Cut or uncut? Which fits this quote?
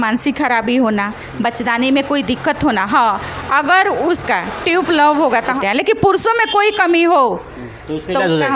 cut